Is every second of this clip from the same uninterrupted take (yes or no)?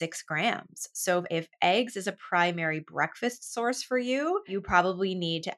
no